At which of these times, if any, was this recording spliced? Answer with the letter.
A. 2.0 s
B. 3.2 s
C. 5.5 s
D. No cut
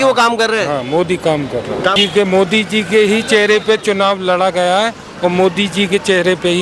A